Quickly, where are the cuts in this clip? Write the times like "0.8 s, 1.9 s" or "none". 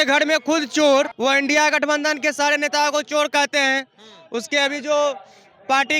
1.1 s